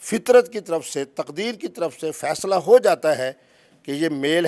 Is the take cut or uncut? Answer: uncut